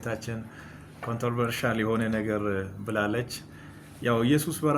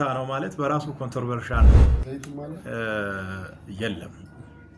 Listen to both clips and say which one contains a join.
second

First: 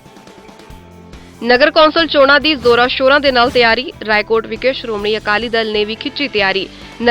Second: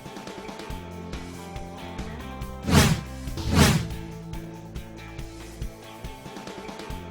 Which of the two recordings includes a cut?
first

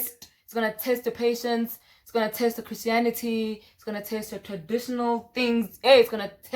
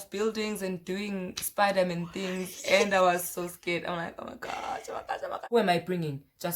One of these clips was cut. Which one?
second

